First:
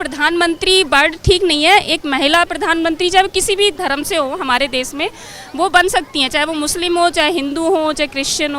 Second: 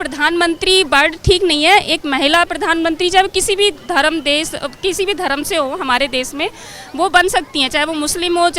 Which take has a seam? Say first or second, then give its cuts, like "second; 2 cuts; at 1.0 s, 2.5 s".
first; 1 cut; at 3.8 s